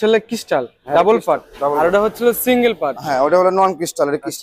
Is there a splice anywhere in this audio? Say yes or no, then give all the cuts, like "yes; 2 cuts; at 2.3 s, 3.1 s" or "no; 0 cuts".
no; 0 cuts